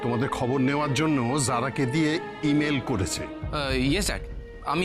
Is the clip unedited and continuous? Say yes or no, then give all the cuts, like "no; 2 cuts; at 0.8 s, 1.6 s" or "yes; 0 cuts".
no; 1 cut; at 3.4 s